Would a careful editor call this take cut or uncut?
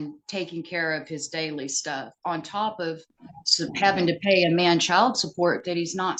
uncut